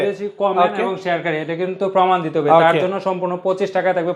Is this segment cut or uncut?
uncut